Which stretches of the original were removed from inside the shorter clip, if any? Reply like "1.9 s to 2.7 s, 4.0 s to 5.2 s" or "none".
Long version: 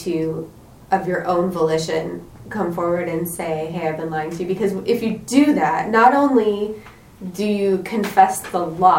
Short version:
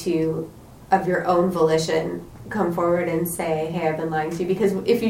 none